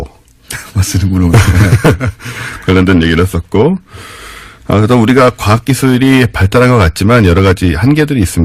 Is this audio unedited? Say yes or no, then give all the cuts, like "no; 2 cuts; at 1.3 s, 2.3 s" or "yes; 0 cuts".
yes; 0 cuts